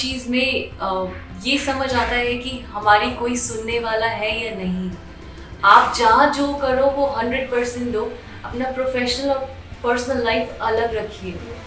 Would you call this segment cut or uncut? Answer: uncut